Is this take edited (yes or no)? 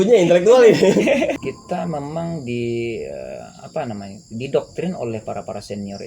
yes